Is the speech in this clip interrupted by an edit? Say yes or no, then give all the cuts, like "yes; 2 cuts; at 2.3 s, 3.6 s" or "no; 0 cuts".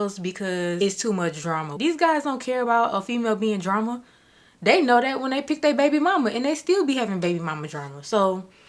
yes; 1 cut; at 1.7 s